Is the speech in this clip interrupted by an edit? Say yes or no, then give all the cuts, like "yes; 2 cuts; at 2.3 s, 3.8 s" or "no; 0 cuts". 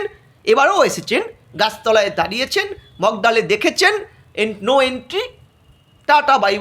no; 0 cuts